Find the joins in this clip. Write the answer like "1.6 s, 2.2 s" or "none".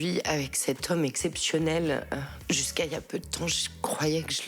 2.4 s